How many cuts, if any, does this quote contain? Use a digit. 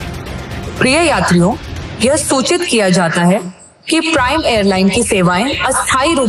0